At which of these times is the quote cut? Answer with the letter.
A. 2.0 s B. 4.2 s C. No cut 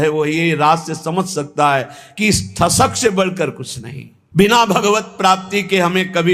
B